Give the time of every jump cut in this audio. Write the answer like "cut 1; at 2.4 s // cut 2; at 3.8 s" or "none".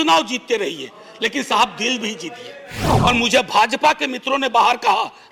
cut 1; at 2.8 s

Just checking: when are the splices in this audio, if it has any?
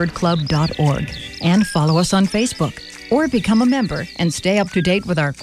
none

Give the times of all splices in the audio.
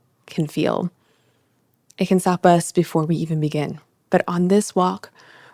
none

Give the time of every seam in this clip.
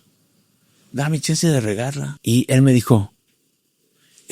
cut 1; at 2.1 s

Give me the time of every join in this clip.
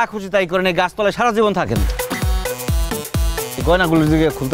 cut 1; at 3.6 s

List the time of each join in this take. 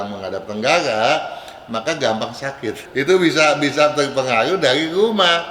cut 1; at 2.8 s

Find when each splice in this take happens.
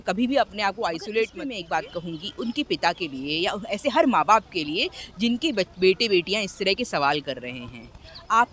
cut 1; at 1.5 s

